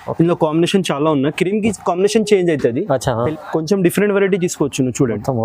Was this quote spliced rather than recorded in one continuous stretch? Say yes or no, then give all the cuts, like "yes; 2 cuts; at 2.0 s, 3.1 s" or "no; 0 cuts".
yes; 1 cut; at 3.3 s